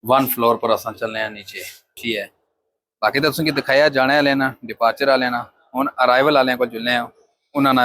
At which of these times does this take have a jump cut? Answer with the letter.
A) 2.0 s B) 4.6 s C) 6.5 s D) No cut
A